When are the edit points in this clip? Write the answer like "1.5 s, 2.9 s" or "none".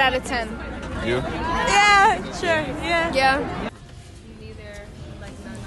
3.7 s